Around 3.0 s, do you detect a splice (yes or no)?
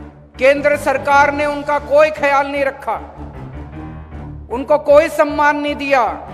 yes